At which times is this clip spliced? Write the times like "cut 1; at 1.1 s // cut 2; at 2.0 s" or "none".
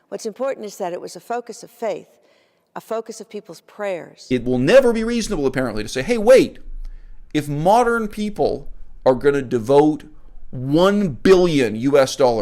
cut 1; at 4.1 s